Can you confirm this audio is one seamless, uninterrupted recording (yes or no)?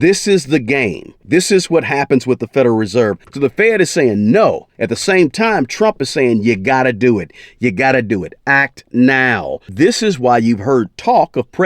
no